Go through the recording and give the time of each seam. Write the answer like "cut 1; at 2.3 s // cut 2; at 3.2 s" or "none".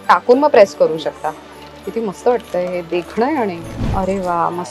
cut 1; at 3.7 s